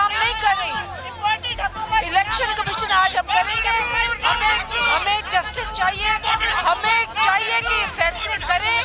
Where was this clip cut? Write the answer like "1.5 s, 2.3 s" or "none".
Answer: none